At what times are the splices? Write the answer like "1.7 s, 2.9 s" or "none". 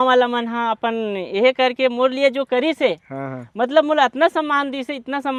none

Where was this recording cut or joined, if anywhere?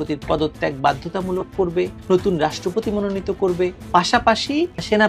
none

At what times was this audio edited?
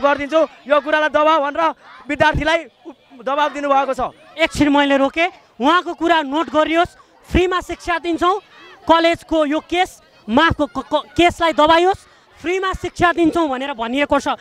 none

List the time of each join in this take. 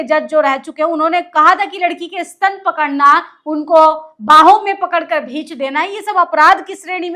none

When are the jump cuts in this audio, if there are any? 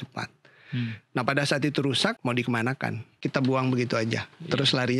2.2 s, 3.1 s

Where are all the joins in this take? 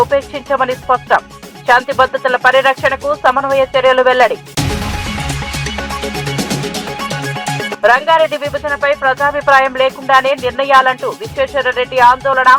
none

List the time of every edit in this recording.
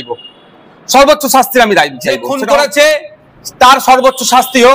2.2 s

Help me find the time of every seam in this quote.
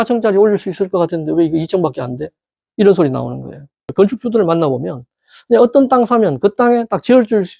3.9 s

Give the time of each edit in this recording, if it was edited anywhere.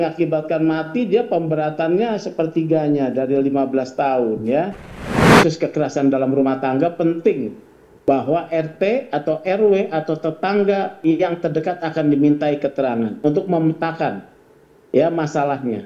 5.1 s

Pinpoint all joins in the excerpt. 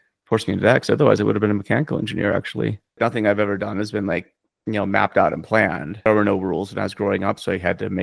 3.0 s, 6.1 s

